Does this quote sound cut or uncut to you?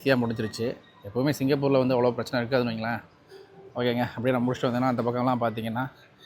uncut